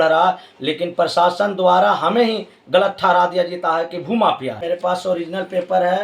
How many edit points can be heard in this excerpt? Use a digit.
1